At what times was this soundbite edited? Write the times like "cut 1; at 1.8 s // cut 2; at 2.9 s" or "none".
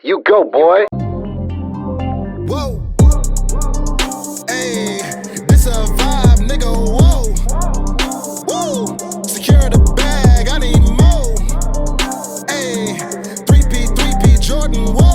cut 1; at 0.9 s